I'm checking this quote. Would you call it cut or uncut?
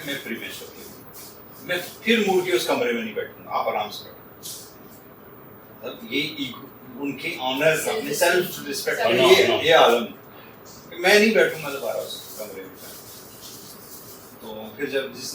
uncut